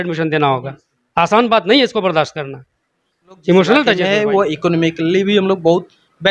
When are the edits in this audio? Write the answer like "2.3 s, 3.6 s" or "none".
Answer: 4.0 s